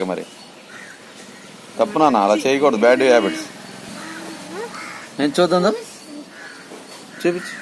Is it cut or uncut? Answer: uncut